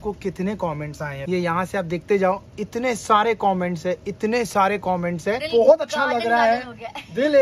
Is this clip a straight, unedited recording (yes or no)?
no